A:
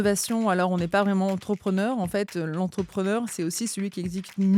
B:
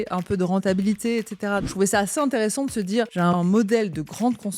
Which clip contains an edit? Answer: B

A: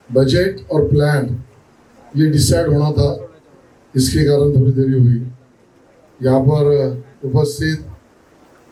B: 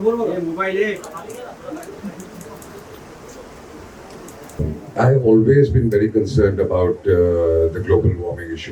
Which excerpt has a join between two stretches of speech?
B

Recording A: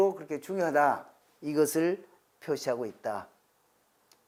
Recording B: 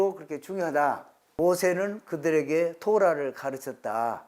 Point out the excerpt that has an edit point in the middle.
B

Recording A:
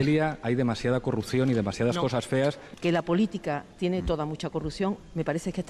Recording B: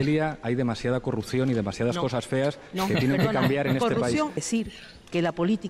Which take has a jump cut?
A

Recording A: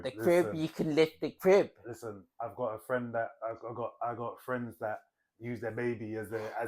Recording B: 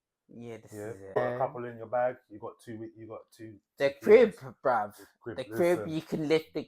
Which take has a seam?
B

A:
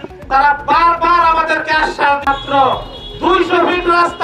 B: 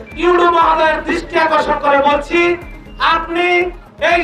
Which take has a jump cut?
A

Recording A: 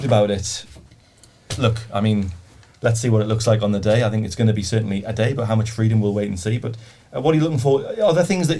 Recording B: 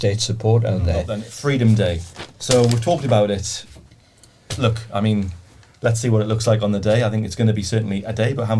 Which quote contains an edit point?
B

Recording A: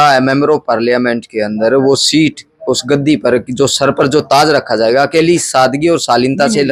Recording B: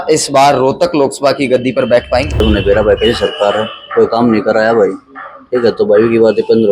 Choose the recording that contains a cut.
B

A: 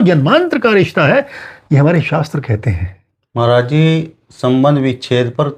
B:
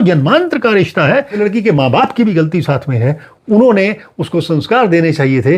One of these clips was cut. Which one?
B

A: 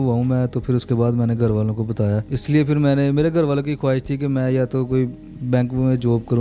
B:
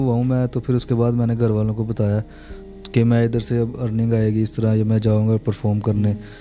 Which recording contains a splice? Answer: A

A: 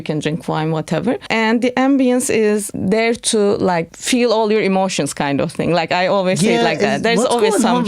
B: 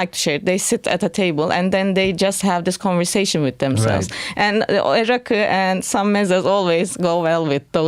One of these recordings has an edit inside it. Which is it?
A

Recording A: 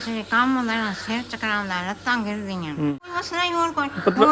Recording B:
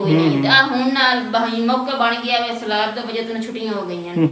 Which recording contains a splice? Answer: A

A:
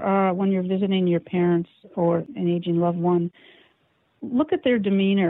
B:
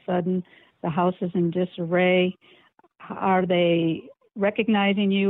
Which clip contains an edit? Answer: A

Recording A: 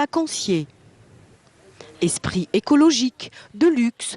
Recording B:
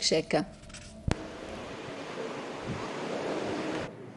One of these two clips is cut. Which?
A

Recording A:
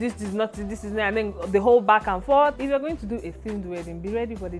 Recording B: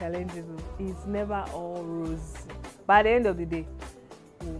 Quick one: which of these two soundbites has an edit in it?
A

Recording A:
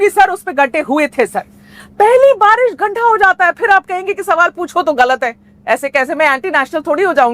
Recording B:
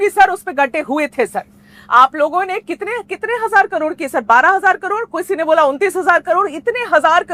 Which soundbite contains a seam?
A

